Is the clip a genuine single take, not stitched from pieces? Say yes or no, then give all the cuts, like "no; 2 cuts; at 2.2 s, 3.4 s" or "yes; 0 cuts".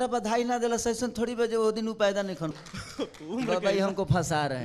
no; 1 cut; at 2.4 s